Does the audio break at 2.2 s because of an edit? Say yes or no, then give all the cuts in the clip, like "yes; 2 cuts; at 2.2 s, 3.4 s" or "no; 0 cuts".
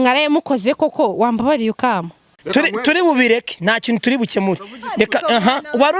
yes; 1 cut; at 2.2 s